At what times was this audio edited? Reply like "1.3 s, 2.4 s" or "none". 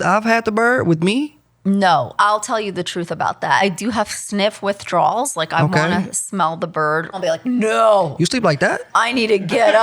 2.1 s, 3.6 s, 7.1 s